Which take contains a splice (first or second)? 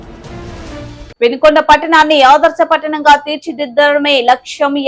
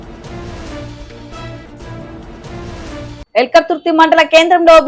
first